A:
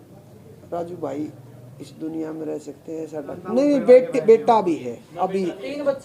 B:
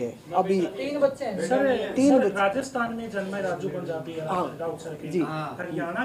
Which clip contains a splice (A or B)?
A